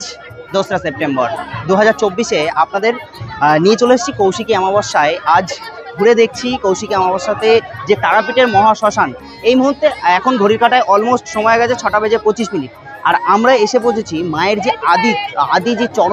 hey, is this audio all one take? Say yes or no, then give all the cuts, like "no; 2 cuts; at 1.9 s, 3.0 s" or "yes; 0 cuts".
yes; 0 cuts